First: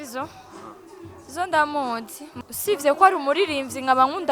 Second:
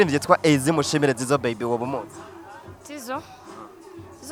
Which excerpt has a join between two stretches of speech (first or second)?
first